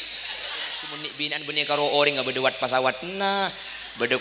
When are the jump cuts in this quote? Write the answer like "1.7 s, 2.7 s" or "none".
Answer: 1.1 s